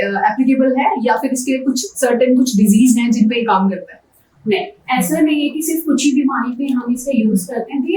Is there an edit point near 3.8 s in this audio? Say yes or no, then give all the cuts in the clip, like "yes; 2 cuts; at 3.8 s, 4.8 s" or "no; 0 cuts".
no; 0 cuts